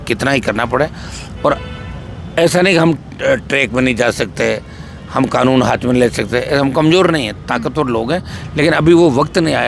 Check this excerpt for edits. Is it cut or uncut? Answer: uncut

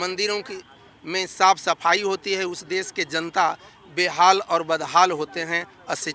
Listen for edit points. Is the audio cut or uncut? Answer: uncut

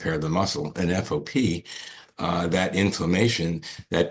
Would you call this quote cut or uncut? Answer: uncut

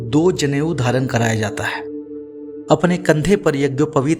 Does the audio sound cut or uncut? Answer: cut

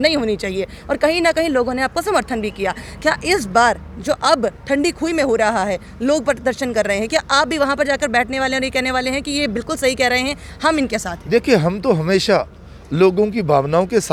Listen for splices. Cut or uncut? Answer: uncut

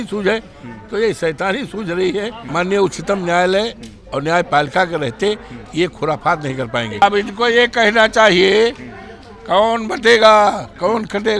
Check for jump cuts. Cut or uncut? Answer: cut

